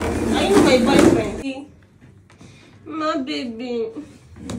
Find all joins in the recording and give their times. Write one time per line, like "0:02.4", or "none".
0:01.4